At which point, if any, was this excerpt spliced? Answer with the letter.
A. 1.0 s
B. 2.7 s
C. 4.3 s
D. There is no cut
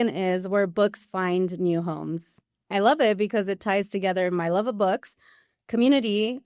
B